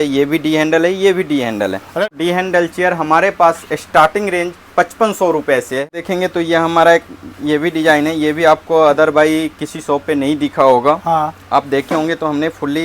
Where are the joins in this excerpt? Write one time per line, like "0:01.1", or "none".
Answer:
0:01.9
0:05.9